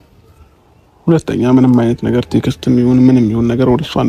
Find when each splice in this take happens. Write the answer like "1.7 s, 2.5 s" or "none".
none